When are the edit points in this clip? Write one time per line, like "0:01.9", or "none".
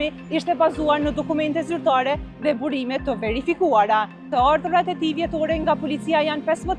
0:04.3